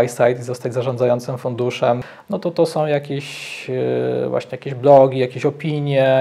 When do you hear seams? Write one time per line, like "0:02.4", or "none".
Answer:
0:02.1